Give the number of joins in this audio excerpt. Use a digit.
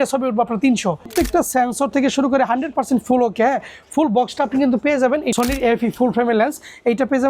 2